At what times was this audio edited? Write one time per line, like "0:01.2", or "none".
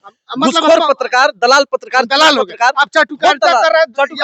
none